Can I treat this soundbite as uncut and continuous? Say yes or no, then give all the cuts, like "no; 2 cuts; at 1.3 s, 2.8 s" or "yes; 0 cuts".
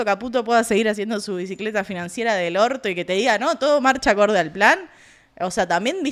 yes; 0 cuts